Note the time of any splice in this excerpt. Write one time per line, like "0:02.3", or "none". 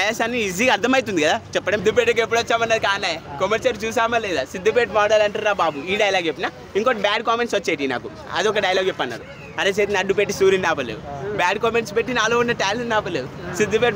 0:01.8